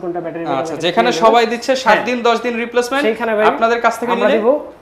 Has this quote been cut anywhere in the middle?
no; 0 cuts

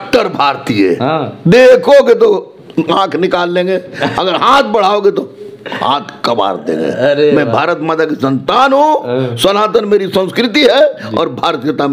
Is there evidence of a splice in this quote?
no; 0 cuts

